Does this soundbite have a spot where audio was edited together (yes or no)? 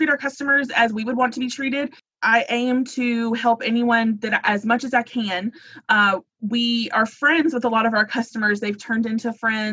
yes